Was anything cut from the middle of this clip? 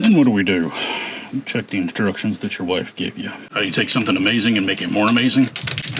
yes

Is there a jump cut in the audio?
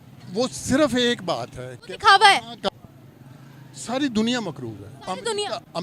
yes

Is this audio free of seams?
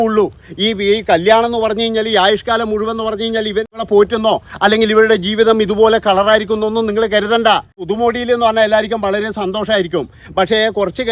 no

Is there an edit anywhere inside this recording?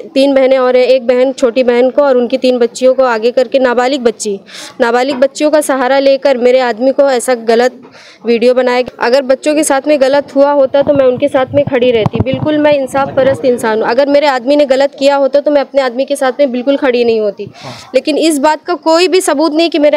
yes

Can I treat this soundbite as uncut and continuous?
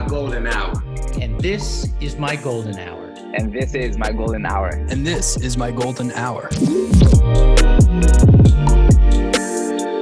yes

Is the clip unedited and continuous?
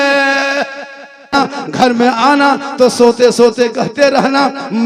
no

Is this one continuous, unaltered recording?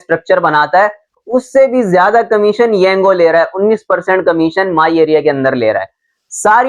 yes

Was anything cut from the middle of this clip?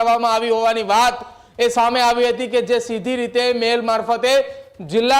no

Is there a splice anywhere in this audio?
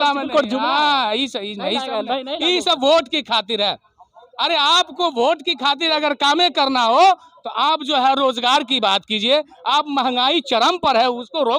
no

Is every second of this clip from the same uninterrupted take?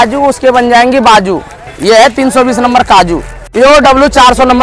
no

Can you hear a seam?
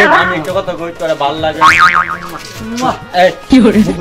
no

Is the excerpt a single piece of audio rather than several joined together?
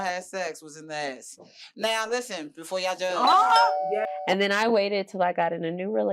no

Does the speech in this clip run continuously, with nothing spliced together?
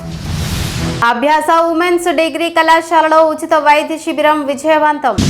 no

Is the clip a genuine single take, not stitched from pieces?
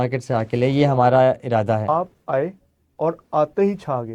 no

